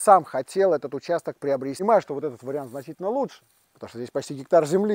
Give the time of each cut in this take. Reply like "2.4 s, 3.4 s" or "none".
1.8 s